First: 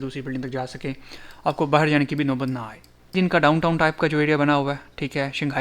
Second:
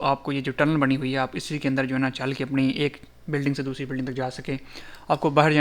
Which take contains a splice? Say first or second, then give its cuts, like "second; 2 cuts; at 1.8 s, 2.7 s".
first; 1 cut; at 3.1 s